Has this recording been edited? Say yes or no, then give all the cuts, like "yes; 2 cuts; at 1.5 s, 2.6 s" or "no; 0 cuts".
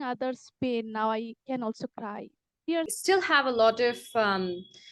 yes; 1 cut; at 3.0 s